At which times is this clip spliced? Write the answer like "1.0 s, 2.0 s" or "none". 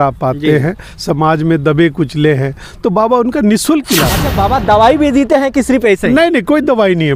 4.3 s